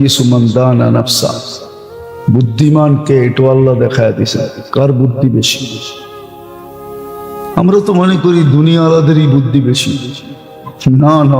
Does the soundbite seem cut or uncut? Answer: cut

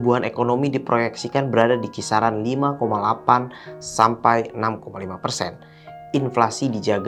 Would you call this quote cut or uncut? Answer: uncut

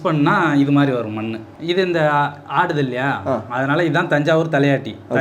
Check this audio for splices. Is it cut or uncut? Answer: cut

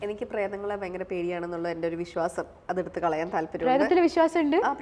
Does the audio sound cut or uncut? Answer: uncut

